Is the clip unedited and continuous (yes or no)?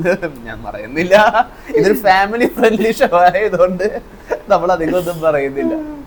yes